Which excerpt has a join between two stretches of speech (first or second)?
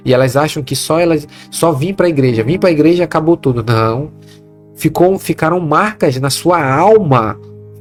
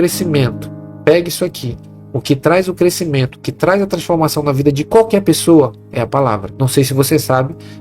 second